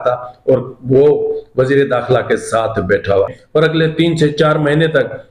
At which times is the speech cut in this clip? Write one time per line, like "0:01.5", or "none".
0:03.4